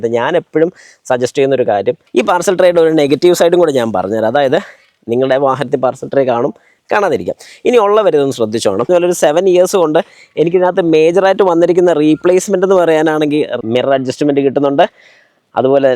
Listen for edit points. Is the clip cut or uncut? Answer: cut